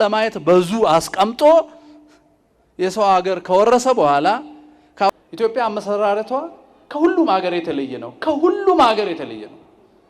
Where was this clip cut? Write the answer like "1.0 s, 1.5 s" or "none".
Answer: 5.1 s